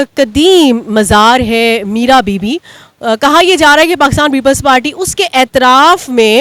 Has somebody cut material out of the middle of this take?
no; 0 cuts

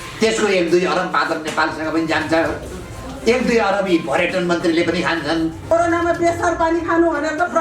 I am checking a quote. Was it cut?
yes; 1 cut; at 5.7 s

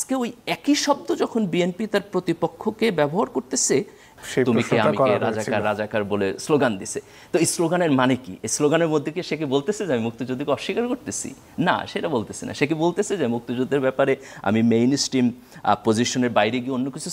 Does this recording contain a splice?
yes; 1 cut; at 4.1 s

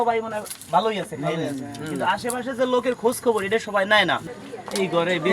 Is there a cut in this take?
yes; 1 cut; at 4.2 s

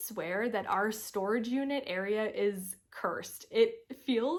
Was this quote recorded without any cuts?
yes; 0 cuts

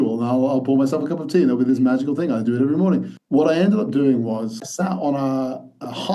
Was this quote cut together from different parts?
yes; 2 cuts; at 3.1 s, 4.7 s

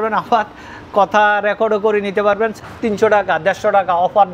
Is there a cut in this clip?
yes; 1 cut; at 2.5 s

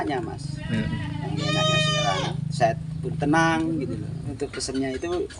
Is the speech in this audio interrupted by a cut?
yes; 1 cut; at 4.3 s

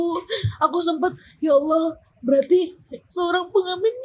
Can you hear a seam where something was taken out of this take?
yes; 2 cuts; at 1.3 s, 3.0 s

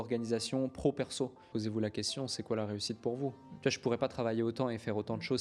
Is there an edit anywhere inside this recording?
yes; 2 cuts; at 1.4 s, 3.5 s

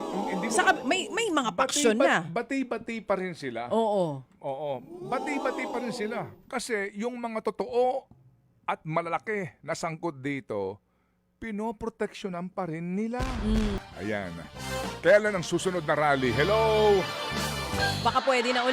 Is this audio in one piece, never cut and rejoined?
no; 1 cut; at 13.8 s

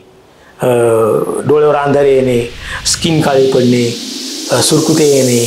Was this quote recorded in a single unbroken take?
yes; 0 cuts

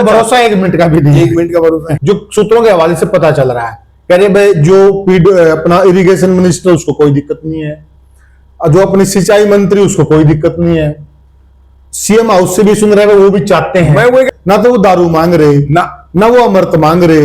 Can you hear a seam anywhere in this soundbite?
yes; 2 cuts; at 1.9 s, 14.3 s

